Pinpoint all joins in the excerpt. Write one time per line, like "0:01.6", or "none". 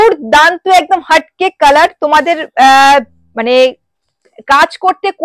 none